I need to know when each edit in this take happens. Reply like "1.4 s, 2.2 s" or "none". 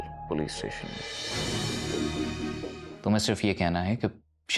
2.9 s